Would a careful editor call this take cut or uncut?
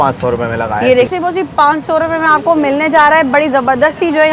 cut